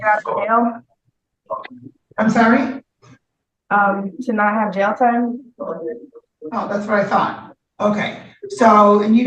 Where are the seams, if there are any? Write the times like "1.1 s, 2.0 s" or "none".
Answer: none